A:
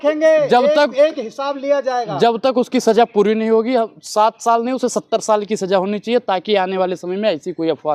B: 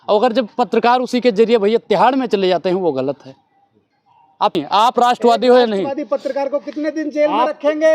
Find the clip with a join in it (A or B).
B